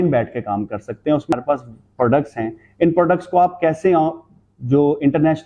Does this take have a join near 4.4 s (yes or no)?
no